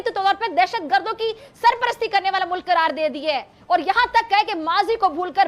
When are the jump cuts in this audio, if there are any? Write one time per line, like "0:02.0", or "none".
none